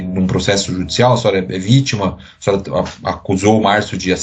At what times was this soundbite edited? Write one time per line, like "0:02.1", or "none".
none

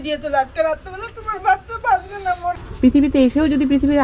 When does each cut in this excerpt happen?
0:02.5

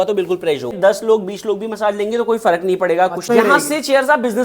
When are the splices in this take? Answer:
0:00.7
0:03.3

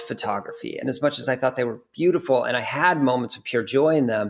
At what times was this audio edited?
none

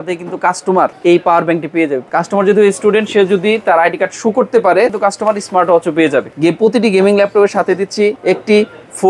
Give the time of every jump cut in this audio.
0:01.0
0:02.0
0:04.9
0:06.3
0:08.2

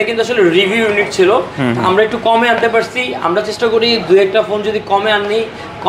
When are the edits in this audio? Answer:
none

